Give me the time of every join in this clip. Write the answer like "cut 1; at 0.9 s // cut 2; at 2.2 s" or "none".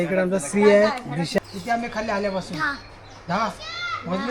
cut 1; at 1.3 s